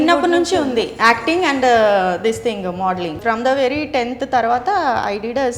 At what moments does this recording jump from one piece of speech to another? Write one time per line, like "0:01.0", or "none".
0:03.2